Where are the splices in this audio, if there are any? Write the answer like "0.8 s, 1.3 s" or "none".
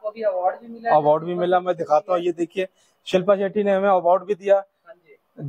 1.2 s